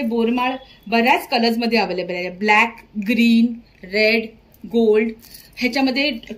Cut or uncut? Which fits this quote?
uncut